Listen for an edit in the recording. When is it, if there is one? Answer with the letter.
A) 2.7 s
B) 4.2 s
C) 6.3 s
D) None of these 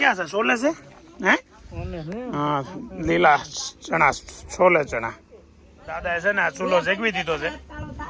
D